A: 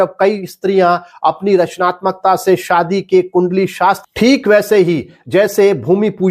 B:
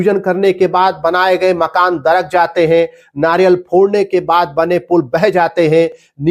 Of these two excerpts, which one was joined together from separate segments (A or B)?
A